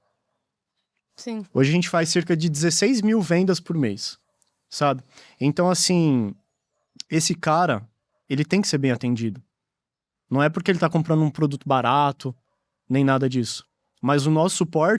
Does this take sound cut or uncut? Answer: uncut